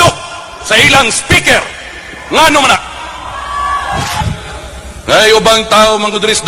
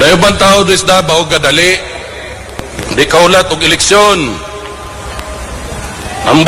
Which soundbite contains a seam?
first; 1 cut; at 4.2 s

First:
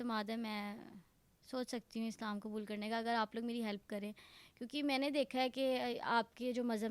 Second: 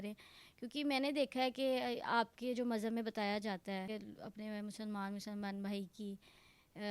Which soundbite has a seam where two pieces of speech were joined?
second; 1 cut; at 3.9 s

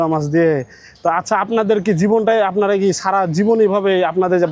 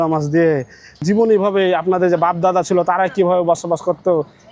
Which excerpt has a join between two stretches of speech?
second; 1 cut; at 1.0 s

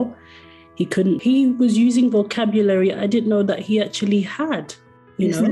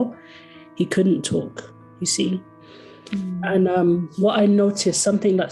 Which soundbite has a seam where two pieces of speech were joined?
first; 1 cut; at 1.2 s

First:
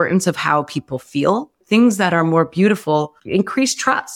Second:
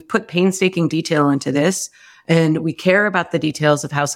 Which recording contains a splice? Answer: first; 2 cuts; at 1.6 s, 3.2 s

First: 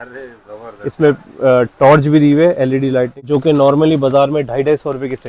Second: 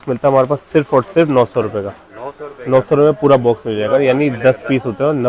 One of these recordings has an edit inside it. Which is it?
first; 1 cut; at 3.2 s

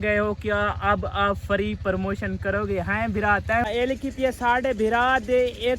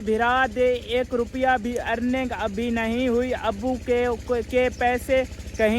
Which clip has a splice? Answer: first; 1 cut; at 3.7 s

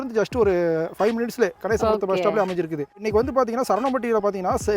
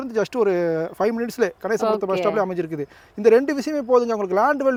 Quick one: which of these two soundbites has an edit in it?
first; 1 cut; at 3.1 s

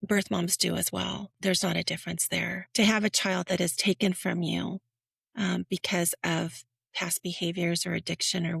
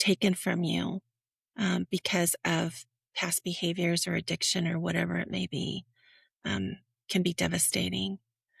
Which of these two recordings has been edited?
first; 2 cuts; at 1.3 s, 2.6 s

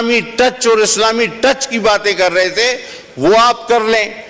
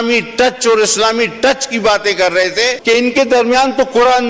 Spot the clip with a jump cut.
second; 1 cut; at 2.8 s

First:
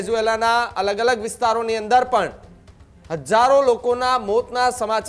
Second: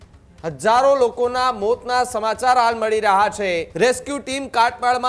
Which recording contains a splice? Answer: second; 1 cut; at 3.7 s

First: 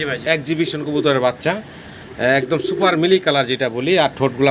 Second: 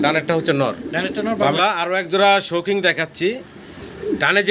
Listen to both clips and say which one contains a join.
second; 1 cut; at 1.5 s

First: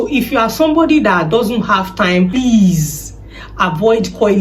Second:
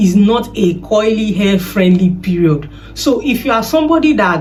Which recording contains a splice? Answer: first; 1 cut; at 2.3 s

